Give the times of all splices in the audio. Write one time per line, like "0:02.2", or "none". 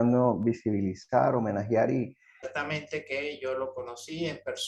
0:02.4